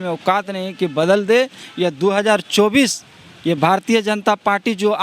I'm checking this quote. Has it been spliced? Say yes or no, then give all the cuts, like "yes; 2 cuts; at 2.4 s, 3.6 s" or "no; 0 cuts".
yes; 1 cut; at 1.6 s